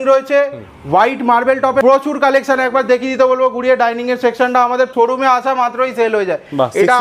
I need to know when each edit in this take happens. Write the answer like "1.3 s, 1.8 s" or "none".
1.8 s, 4.9 s